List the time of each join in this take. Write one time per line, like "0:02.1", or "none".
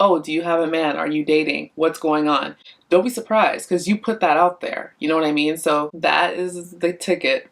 0:05.9

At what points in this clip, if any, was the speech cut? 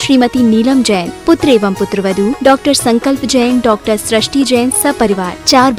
none

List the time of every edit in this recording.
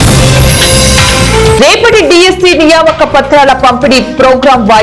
0:01.6

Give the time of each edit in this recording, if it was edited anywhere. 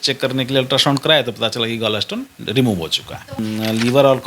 0:03.3

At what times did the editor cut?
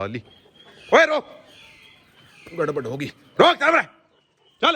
none

